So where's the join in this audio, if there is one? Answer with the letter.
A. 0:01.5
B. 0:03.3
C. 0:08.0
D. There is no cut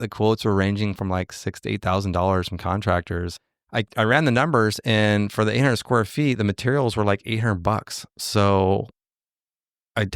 B